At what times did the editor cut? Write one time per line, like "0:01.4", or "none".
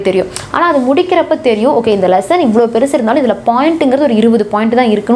none